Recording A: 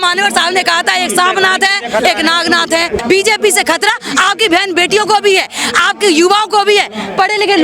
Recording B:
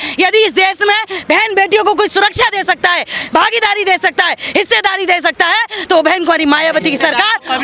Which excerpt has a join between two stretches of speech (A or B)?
A